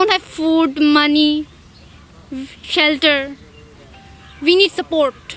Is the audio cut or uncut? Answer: uncut